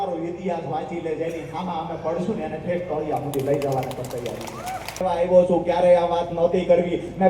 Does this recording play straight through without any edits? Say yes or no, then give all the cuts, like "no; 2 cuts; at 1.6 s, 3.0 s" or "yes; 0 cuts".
no; 1 cut; at 5.0 s